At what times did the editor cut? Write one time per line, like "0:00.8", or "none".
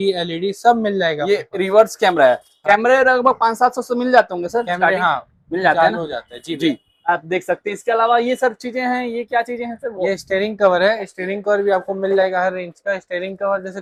none

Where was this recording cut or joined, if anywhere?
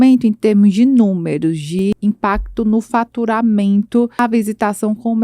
0:01.9
0:04.2

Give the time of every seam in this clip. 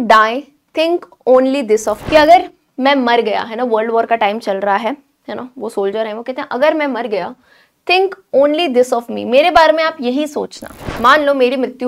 0:02.0
0:10.8

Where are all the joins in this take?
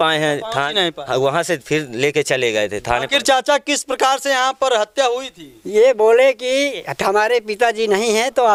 none

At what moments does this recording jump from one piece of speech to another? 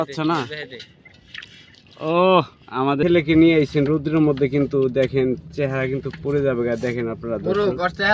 0:03.0

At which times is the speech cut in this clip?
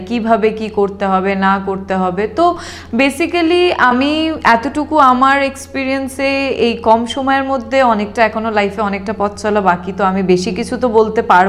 none

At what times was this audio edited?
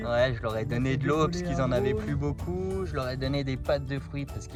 none

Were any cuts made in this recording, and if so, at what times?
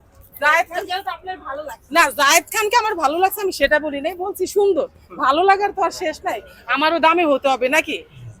none

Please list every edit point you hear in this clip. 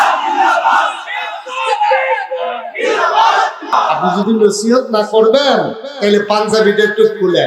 0:04.1

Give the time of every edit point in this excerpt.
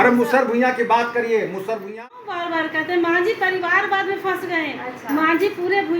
0:01.9

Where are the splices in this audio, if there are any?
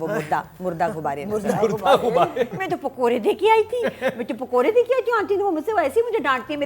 0:02.6

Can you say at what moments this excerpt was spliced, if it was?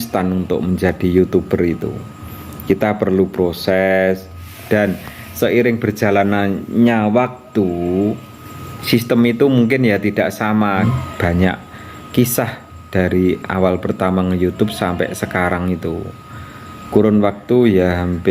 0:10.8

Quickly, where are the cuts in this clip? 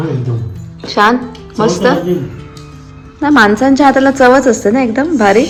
none

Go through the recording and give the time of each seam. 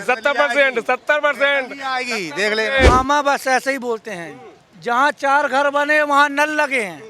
0:02.9

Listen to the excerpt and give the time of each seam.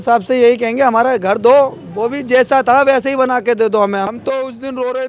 0:04.2

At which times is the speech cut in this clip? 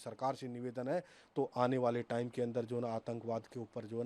none

